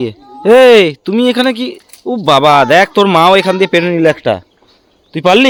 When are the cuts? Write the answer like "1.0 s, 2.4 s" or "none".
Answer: none